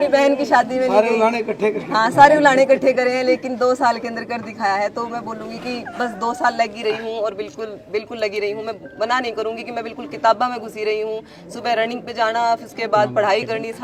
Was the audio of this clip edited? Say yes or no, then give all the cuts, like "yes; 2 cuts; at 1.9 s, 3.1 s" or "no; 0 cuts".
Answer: no; 0 cuts